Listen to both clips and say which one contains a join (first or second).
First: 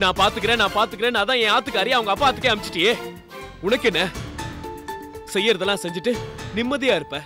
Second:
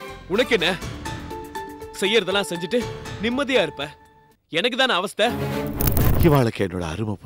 second